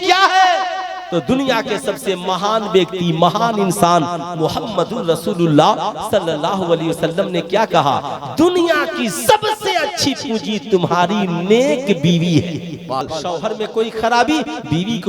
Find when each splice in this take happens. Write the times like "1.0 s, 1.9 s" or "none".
13.1 s

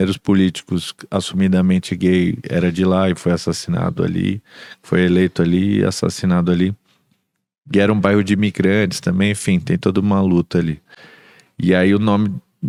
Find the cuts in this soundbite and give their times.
none

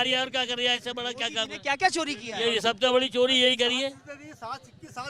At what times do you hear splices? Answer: none

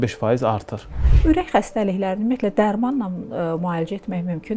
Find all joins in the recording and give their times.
1.1 s

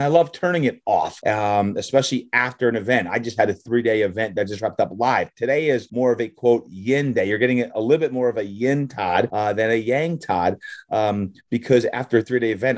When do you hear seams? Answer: 1.1 s, 5.9 s, 9.3 s

